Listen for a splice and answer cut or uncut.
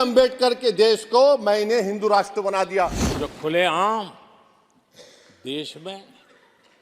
cut